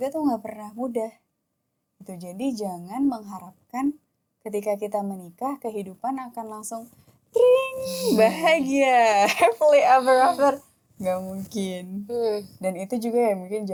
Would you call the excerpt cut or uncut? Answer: uncut